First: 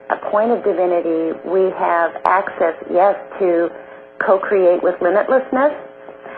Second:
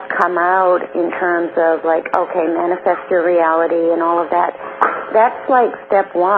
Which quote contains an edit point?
second; 1 cut; at 3.7 s

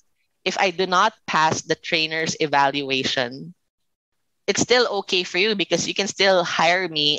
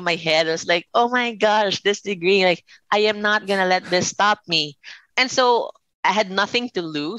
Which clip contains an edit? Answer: second; 2 cuts; at 5.0 s, 5.8 s

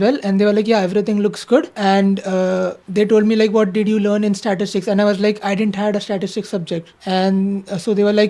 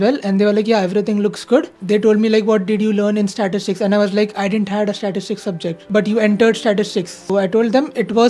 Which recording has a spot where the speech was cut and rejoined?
second; 3 cuts; at 1.7 s, 5.8 s, 7.2 s

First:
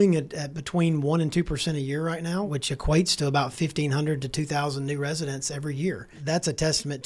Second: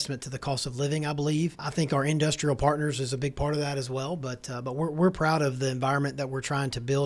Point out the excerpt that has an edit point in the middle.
first; 1 cut; at 6.1 s

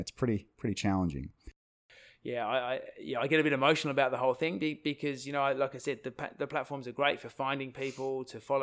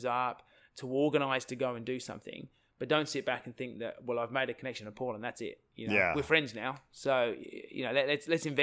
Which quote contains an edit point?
first; 1 cut; at 1.9 s

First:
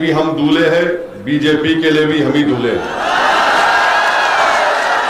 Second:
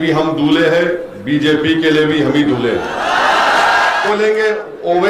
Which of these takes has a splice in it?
second; 1 cut; at 4.1 s

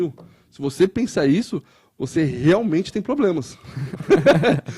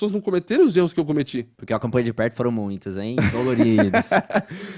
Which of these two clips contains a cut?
second; 1 cut; at 1.5 s

